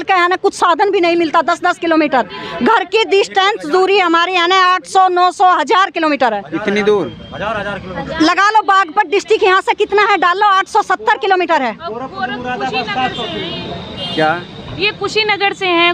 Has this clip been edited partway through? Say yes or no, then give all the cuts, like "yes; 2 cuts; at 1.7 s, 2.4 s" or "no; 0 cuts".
no; 0 cuts